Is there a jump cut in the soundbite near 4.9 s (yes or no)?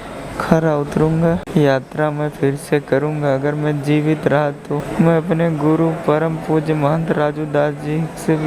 yes